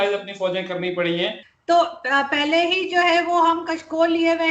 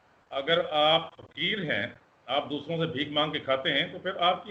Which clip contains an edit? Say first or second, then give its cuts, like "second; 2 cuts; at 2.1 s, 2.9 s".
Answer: first; 1 cut; at 1.5 s